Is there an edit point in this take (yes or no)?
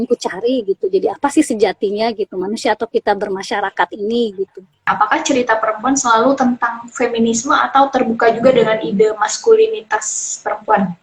yes